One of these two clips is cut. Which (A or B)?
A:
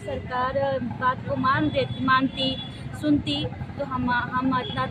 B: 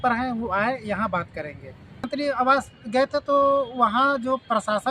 B